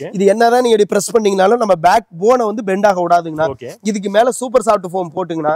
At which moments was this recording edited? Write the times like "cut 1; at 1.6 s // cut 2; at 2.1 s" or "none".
none